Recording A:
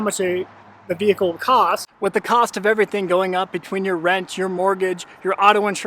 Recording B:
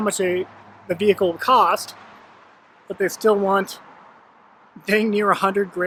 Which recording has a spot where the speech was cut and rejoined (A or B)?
A